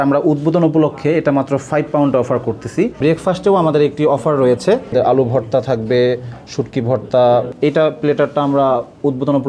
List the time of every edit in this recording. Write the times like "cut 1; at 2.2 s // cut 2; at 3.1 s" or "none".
cut 1; at 3.0 s // cut 2; at 4.9 s // cut 3; at 7.5 s